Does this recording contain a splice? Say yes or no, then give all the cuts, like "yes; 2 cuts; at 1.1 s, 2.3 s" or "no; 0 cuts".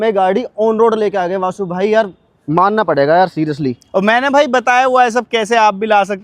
no; 0 cuts